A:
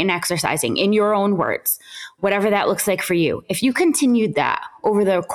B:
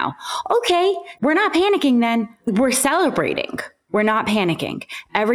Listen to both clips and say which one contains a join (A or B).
B